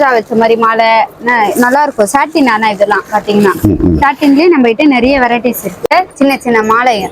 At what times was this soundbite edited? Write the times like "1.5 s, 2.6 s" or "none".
5.8 s